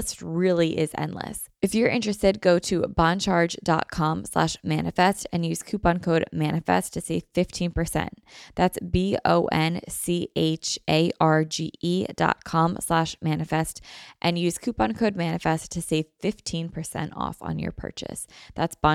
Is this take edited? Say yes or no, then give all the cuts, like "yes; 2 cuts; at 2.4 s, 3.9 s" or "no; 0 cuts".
yes; 1 cut; at 1.4 s